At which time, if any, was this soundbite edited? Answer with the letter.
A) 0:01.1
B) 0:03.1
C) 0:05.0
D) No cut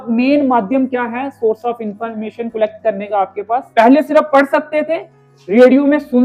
B